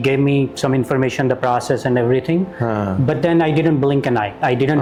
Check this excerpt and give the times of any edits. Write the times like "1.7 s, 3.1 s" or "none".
none